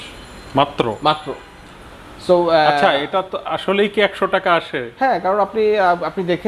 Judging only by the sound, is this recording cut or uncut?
uncut